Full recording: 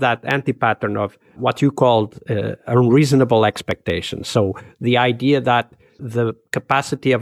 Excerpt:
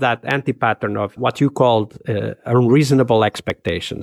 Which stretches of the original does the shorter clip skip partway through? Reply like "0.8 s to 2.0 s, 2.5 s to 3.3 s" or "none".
1.1 s to 1.3 s